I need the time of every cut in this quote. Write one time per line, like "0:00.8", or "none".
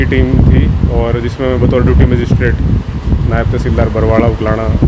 none